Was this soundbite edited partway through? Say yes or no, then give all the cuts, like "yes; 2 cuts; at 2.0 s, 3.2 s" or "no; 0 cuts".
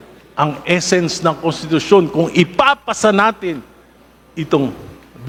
no; 0 cuts